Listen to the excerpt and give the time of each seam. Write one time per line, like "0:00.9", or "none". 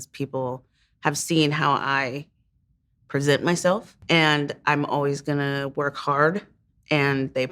0:04.0